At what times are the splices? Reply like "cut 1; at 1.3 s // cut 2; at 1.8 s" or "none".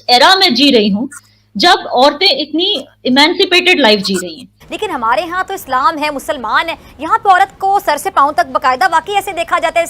cut 1; at 4.6 s